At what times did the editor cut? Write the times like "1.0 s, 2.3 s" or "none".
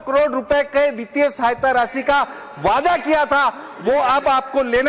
none